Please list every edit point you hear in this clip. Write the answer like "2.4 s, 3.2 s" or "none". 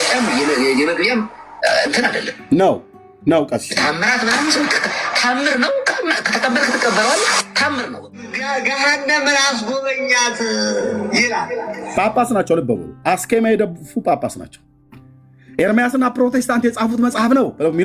1.5 s, 2.6 s, 8.4 s